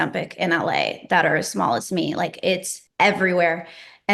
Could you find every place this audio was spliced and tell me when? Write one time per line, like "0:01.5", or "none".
0:02.8